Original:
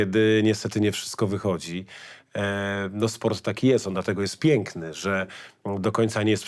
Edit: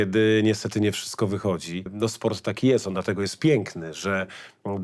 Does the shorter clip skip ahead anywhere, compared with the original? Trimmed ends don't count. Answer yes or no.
yes